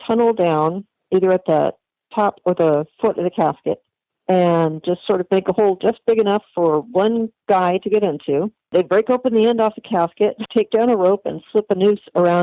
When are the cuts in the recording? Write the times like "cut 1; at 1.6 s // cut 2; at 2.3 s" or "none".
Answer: cut 1; at 0.9 s // cut 2; at 8.7 s // cut 3; at 10.4 s